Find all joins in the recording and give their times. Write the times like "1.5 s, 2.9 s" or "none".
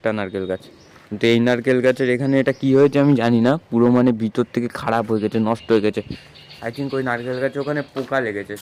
none